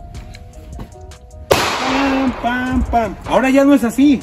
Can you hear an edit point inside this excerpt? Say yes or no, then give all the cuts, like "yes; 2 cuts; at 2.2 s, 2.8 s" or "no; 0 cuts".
yes; 1 cut; at 3.2 s